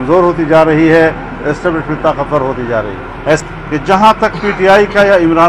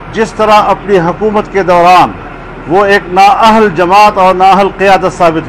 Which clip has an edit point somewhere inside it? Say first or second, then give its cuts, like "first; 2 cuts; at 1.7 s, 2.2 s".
first; 1 cut; at 3.4 s